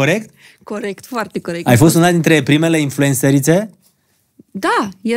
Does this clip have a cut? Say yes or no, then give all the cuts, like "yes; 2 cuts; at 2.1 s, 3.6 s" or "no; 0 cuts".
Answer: yes; 1 cut; at 1.6 s